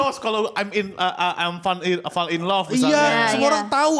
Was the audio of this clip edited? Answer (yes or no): no